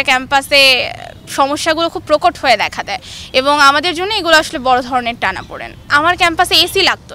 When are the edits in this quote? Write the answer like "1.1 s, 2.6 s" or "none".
5.9 s